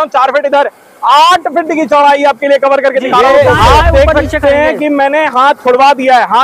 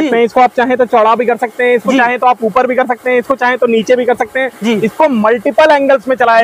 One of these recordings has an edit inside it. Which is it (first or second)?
first